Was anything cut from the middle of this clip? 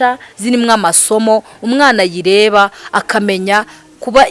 no; 0 cuts

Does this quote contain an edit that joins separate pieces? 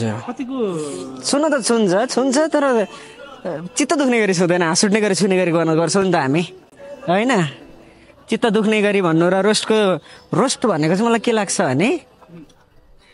no; 0 cuts

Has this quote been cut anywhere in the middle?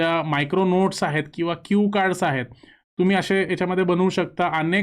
no; 0 cuts

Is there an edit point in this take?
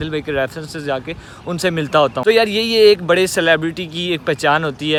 no; 0 cuts

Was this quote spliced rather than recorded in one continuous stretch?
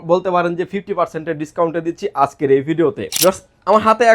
yes; 1 cut; at 3.1 s

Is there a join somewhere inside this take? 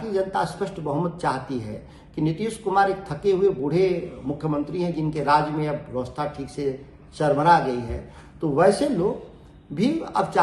no; 0 cuts

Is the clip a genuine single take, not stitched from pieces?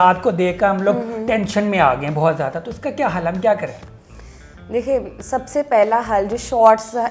yes; 0 cuts

